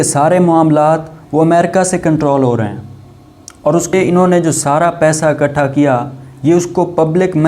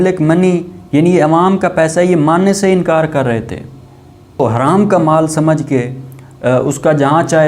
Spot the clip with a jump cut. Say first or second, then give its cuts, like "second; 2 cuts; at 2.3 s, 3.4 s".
first; 1 cut; at 3.9 s